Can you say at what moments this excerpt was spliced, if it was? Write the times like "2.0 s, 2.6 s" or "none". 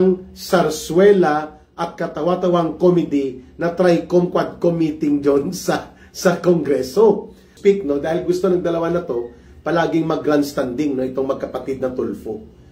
7.5 s